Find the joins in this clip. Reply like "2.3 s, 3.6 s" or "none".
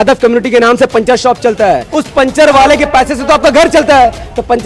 1.9 s